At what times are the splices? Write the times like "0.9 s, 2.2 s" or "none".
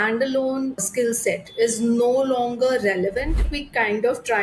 3.4 s